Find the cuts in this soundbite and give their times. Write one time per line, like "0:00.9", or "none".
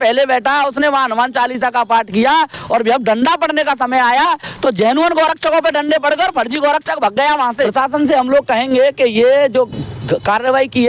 0:07.5

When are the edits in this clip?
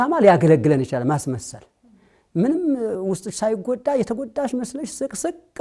none

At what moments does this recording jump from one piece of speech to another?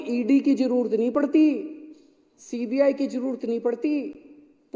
none

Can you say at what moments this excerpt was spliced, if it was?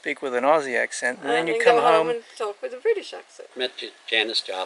0:03.5

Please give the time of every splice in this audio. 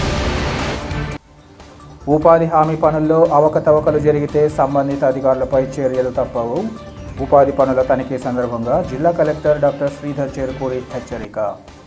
0:01.0

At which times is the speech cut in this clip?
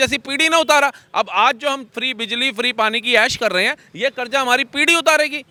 none

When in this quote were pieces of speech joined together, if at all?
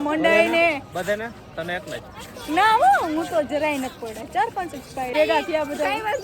0:05.1

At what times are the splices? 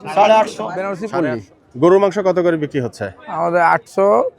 0:01.0

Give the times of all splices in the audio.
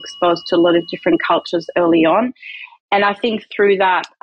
none

